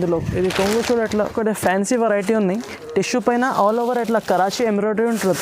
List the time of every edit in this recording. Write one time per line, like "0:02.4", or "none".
0:01.2